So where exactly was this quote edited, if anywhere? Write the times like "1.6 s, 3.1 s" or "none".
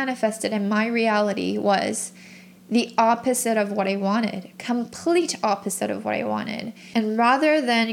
6.8 s